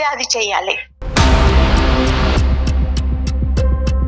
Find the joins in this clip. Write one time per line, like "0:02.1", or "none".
0:00.9